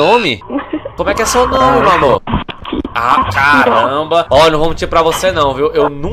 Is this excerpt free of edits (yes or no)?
no